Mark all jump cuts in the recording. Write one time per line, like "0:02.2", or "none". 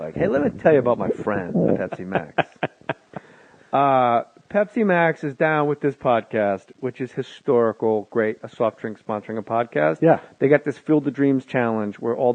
0:09.3